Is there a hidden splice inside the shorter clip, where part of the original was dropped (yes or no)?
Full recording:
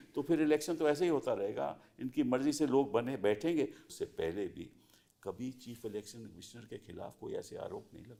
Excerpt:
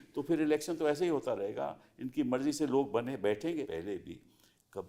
yes